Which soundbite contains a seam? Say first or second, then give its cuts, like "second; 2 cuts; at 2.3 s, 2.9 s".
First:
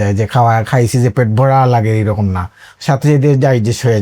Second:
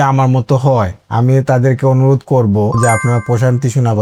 first; 1 cut; at 2.7 s